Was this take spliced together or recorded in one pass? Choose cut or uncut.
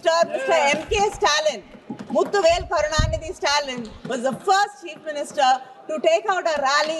uncut